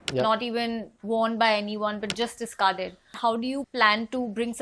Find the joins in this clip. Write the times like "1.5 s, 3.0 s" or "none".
3.4 s